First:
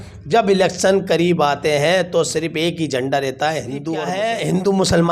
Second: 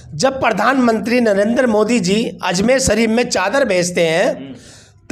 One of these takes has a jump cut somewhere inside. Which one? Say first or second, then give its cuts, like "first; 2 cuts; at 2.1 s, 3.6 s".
first; 1 cut; at 4.0 s